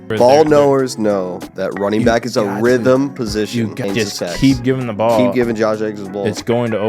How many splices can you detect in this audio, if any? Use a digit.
1